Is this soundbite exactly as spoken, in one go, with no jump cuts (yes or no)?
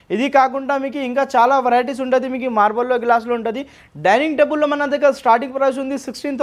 yes